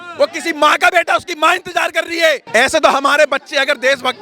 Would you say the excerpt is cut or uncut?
cut